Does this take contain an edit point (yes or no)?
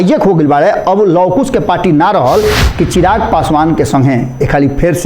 yes